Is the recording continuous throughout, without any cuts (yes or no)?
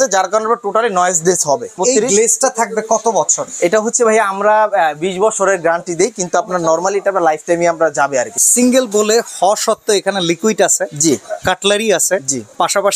no